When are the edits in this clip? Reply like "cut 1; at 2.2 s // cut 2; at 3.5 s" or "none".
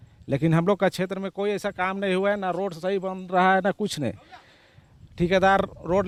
none